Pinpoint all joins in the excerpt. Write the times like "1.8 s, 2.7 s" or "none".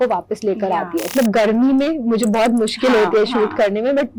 1.1 s